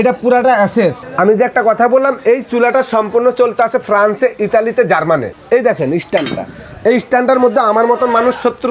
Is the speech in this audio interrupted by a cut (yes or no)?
yes